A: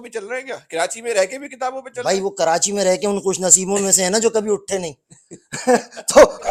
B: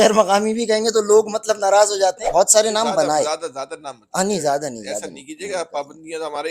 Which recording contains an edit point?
B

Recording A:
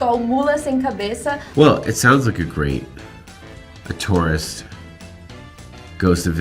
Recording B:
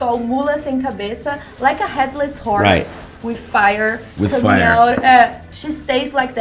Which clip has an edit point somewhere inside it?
A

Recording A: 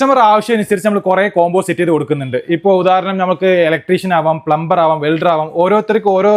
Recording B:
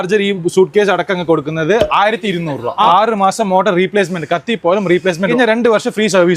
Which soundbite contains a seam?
B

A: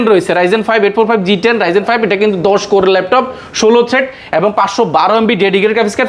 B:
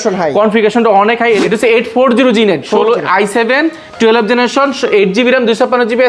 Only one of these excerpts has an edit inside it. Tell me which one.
B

